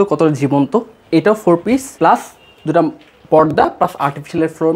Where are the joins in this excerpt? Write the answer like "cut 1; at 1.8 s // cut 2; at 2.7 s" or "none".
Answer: cut 1; at 1.9 s